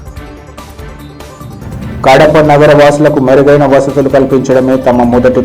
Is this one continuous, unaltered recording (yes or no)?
no